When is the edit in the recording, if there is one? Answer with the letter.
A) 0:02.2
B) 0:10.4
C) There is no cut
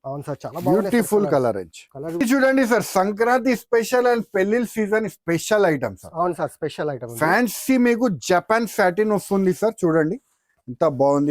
A